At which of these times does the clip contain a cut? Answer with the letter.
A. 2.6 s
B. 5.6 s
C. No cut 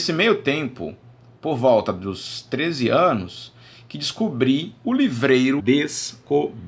C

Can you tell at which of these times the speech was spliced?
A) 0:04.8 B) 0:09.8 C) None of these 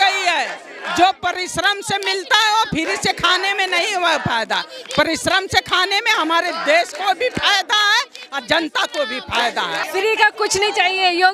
B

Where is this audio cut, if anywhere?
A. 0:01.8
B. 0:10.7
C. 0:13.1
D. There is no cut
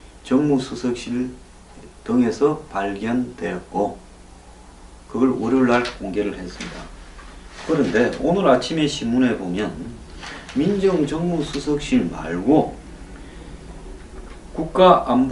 B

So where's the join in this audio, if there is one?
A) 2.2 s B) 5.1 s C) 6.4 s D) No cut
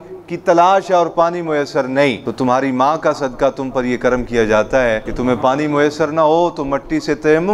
B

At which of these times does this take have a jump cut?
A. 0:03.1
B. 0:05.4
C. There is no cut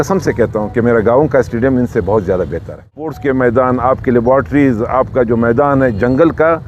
A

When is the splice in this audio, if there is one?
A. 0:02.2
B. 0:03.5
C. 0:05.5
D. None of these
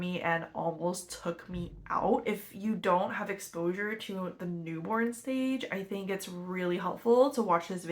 A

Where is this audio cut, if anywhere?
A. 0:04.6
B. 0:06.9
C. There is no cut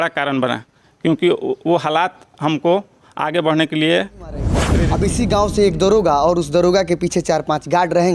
A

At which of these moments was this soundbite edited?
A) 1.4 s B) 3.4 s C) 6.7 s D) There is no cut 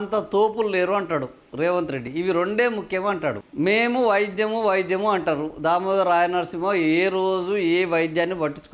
B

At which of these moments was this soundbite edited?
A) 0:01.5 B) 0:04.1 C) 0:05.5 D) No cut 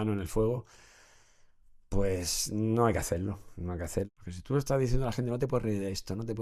B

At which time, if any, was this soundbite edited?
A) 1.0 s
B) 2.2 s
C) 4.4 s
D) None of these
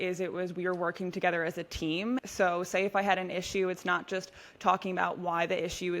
B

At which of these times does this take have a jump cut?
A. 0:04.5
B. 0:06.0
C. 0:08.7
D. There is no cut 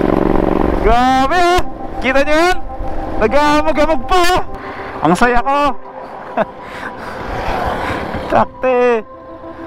A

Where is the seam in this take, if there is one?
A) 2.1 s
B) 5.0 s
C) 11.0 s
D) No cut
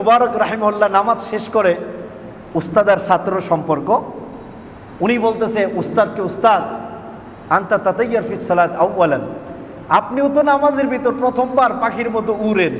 D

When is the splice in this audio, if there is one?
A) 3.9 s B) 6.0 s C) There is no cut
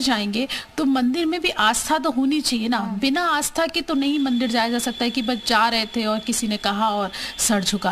C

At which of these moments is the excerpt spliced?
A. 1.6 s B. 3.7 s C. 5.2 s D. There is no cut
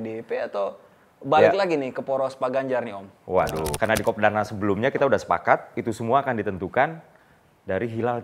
B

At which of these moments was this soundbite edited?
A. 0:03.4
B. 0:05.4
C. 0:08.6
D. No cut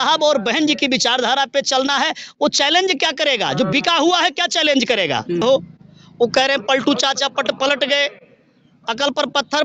B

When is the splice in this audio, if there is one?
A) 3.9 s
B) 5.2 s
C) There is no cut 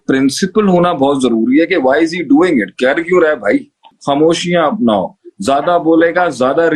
A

